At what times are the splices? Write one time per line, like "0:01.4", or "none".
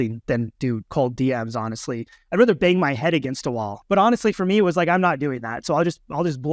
0:03.7